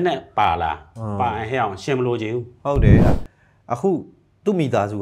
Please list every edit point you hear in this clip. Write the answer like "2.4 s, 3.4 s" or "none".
3.0 s